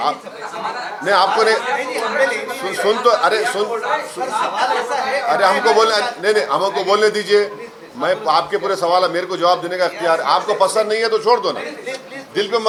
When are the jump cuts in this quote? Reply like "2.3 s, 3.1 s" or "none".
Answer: none